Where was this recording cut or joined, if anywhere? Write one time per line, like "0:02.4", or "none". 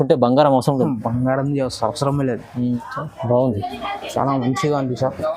0:02.7